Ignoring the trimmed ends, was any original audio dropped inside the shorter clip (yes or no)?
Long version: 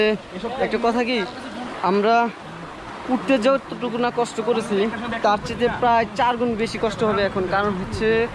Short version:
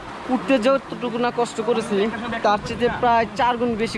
no